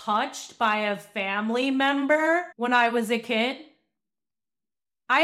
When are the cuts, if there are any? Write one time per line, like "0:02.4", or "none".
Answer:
0:02.5